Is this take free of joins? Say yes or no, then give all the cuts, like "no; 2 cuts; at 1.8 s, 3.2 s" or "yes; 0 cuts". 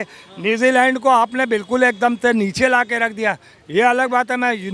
yes; 0 cuts